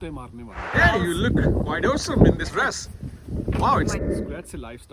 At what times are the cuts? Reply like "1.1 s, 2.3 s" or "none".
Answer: 0.7 s, 4.0 s